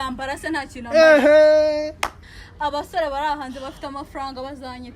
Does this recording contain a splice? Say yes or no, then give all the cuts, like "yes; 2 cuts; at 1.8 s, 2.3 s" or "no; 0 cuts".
yes; 1 cut; at 2.2 s